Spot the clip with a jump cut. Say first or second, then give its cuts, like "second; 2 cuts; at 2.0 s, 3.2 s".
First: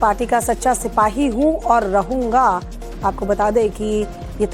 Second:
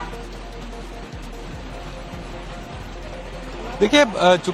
first; 1 cut; at 1.7 s